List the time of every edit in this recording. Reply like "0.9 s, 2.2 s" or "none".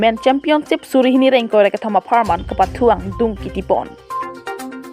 4.0 s